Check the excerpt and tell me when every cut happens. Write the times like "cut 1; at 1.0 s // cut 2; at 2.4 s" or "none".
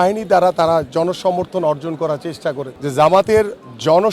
cut 1; at 2.7 s